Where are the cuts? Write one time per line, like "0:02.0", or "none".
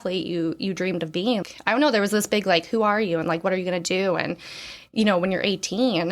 0:01.5